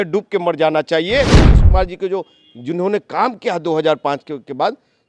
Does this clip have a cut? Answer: yes; 1 cut; at 1.4 s

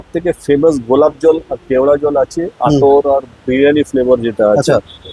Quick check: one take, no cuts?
yes; 0 cuts

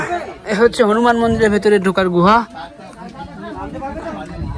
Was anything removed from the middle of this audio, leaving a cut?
no; 0 cuts

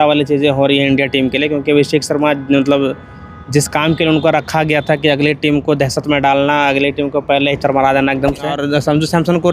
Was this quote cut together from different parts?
yes; 1 cut; at 8.5 s

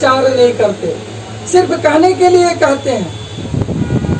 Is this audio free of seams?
yes; 0 cuts

